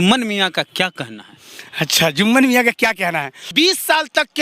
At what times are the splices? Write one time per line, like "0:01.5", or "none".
0:03.5